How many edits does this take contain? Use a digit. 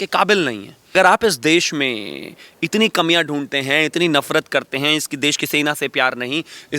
1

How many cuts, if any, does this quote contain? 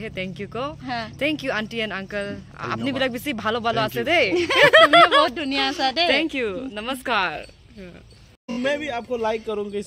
1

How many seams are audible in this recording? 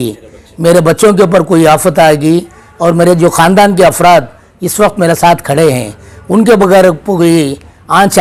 0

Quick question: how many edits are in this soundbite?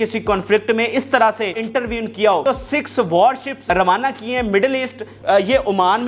4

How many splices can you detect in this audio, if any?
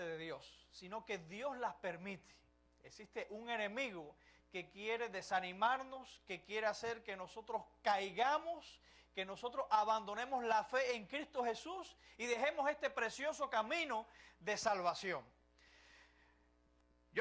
0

